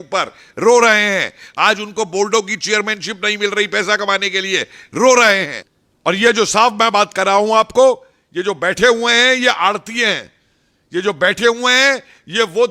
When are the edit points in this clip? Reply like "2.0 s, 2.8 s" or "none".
5.5 s